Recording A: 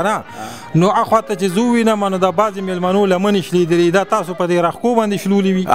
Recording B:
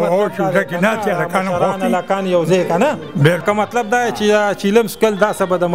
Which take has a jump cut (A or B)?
B